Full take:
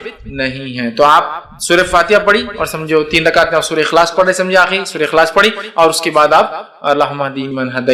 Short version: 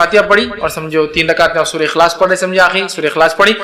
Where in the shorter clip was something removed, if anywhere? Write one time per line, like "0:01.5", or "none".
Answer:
none